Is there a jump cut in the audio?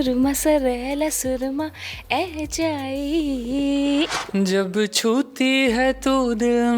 yes; 1 cut; at 4.2 s

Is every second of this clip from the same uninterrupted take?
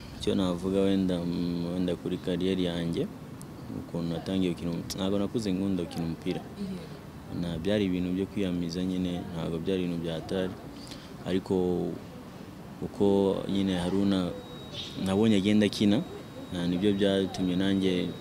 yes; 0 cuts

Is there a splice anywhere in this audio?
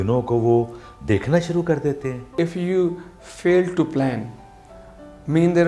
yes; 1 cut; at 2.3 s

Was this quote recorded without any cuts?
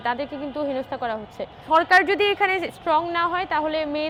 yes; 0 cuts

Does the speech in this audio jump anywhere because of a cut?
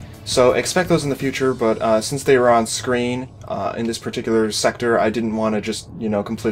yes; 1 cut; at 2.0 s

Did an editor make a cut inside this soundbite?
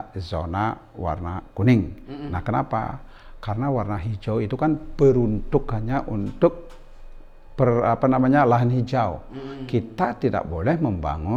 no; 0 cuts

